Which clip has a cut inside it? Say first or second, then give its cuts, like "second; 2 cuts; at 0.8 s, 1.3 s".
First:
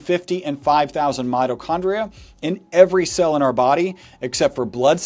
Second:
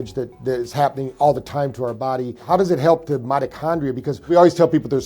second; 2 cuts; at 2.4 s, 4.3 s